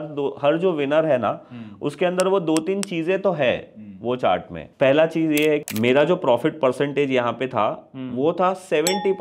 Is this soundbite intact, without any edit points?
no; 2 cuts; at 4.6 s, 5.6 s

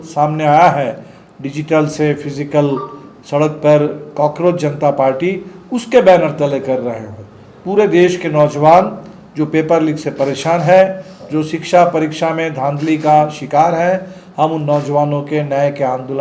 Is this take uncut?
yes; 0 cuts

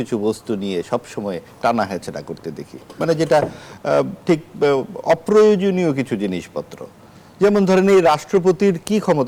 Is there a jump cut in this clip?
no; 0 cuts

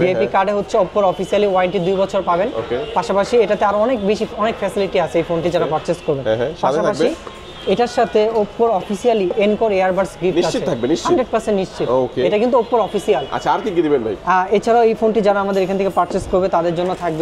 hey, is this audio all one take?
yes; 0 cuts

